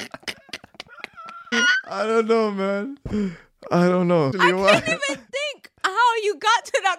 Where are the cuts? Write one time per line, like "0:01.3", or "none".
0:01.5
0:04.3